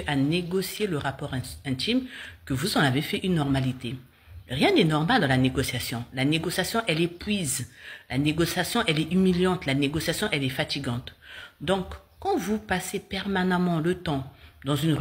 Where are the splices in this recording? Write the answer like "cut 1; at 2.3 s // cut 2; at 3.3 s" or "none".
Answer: cut 1; at 11.3 s